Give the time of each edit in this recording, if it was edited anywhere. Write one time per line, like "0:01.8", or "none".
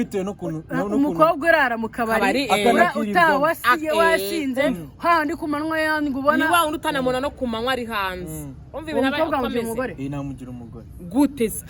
none